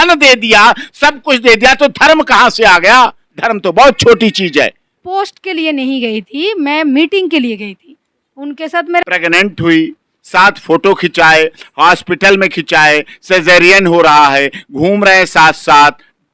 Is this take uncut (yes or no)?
no